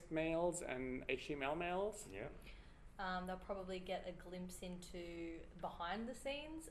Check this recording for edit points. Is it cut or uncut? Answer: uncut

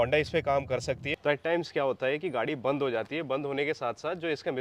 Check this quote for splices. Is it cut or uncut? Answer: cut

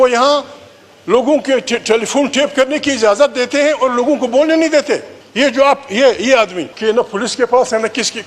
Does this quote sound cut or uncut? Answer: cut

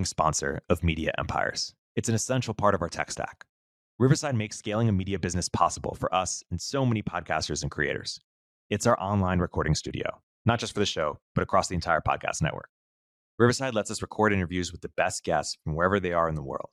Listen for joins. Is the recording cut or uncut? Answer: uncut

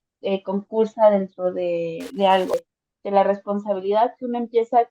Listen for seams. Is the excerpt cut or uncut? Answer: cut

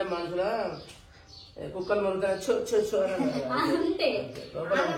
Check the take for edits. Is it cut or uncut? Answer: uncut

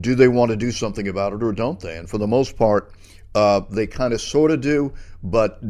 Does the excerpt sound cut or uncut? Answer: uncut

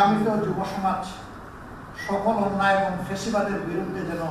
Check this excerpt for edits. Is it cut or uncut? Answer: uncut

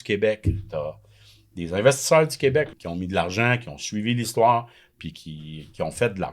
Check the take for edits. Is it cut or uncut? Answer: cut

